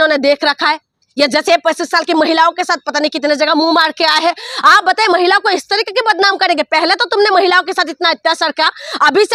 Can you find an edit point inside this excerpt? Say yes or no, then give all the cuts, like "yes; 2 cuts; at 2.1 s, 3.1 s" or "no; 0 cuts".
no; 0 cuts